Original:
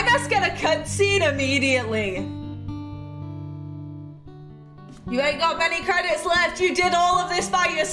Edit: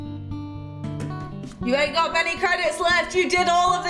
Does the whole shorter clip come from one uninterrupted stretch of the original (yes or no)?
no